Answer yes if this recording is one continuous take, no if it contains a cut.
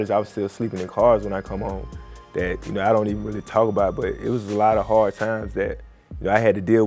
yes